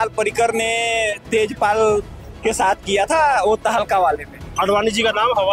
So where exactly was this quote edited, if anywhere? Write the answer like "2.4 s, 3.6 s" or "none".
4.5 s